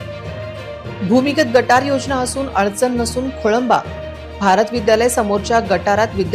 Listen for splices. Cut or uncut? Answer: uncut